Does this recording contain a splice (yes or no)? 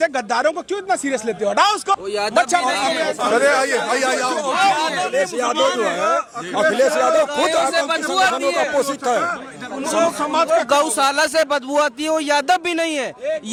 no